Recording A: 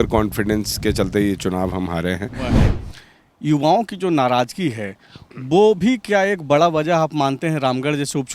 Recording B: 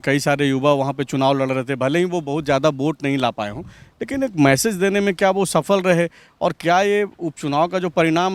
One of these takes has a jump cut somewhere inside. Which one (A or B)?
A